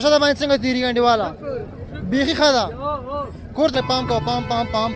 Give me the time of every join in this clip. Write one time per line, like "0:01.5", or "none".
0:03.7